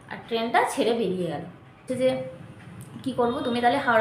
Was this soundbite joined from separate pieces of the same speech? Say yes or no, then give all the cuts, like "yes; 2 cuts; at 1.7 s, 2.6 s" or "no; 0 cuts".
yes; 1 cut; at 1.8 s